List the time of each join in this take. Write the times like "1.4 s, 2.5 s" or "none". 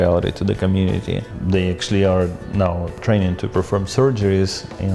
1.3 s, 3.0 s